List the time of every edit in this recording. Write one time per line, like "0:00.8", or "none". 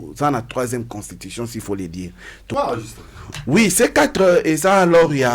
0:02.5